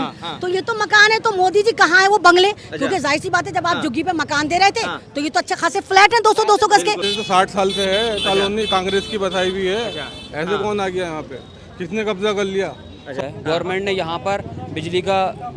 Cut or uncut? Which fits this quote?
cut